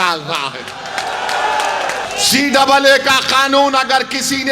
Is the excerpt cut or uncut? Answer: cut